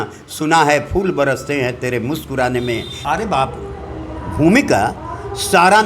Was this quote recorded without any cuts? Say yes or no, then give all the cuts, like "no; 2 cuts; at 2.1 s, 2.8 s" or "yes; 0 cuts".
no; 1 cut; at 3.0 s